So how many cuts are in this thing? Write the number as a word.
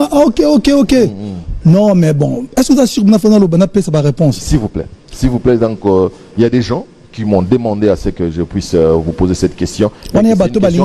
zero